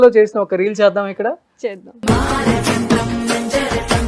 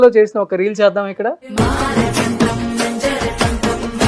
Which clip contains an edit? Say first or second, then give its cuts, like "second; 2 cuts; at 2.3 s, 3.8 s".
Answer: second; 1 cut; at 1.4 s